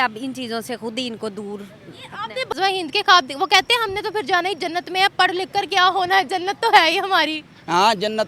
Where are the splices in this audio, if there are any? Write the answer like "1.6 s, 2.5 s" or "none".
2.5 s